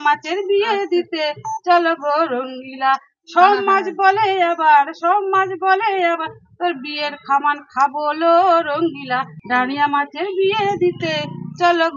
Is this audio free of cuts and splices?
no; 1 cut; at 9.3 s

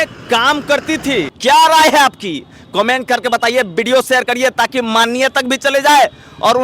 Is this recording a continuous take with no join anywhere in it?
no; 1 cut; at 1.4 s

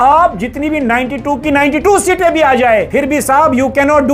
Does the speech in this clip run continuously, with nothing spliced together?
no; 1 cut; at 2.9 s

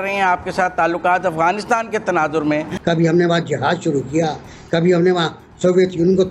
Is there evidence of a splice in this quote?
yes; 1 cut; at 2.7 s

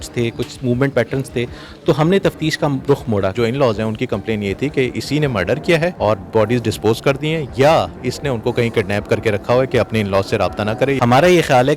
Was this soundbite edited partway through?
yes; 3 cuts; at 3.3 s, 6.0 s, 11.0 s

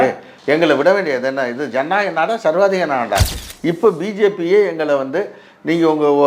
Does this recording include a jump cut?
yes; 1 cut; at 3.4 s

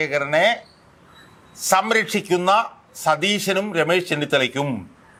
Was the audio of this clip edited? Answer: no; 0 cuts

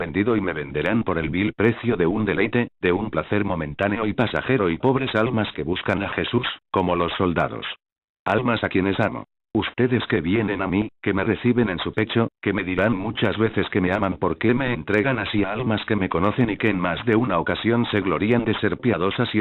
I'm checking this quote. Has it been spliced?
yes; 1 cut; at 8.1 s

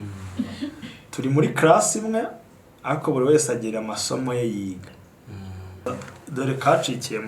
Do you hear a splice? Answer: yes; 1 cut; at 5.9 s

